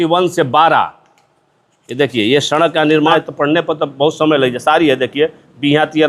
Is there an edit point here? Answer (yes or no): yes